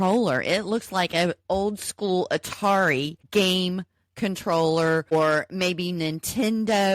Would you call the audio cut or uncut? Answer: cut